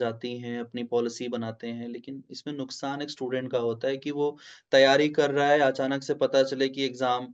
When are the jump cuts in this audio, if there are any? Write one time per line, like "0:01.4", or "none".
none